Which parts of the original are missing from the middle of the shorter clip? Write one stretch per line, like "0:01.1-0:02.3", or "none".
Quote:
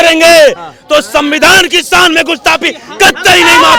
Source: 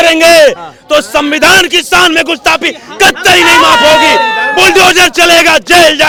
none